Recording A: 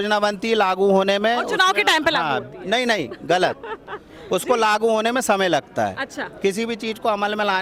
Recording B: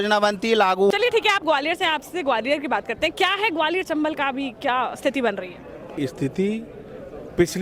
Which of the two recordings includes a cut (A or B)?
B